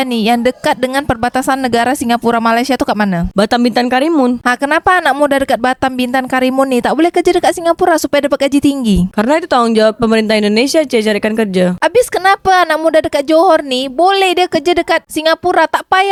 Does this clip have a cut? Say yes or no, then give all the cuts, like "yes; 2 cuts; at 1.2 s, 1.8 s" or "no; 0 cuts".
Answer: no; 0 cuts